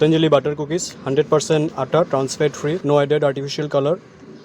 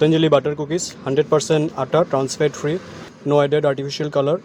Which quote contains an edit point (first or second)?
first